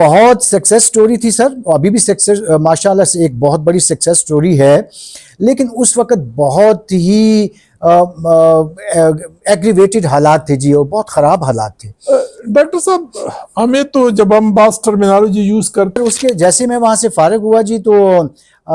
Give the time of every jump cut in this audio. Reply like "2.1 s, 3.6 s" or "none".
16.0 s